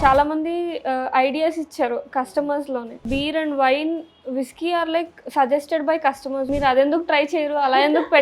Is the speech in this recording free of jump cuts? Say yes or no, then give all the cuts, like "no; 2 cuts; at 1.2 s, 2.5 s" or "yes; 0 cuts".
no; 2 cuts; at 3.1 s, 6.5 s